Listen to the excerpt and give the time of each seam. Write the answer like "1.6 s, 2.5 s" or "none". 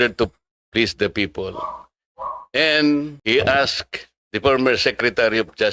3.1 s